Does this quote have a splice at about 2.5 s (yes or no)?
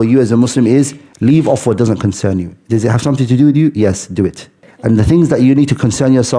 no